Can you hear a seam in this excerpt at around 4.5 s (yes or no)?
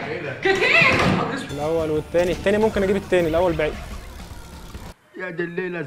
no